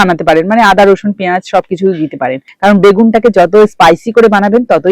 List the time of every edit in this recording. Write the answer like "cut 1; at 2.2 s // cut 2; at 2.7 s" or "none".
cut 1; at 2.5 s